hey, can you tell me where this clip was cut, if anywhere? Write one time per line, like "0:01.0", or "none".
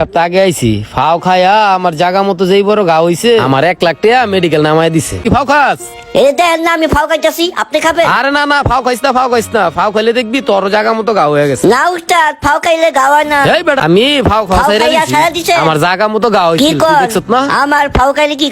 0:05.2
0:13.8